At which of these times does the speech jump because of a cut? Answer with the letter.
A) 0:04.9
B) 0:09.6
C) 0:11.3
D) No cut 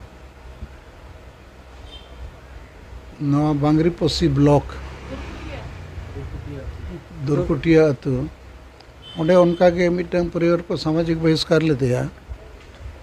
D